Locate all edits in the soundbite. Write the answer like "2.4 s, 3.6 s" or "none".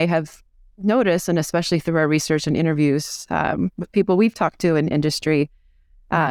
none